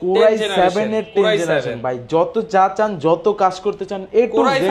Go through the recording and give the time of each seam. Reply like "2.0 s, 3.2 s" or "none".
none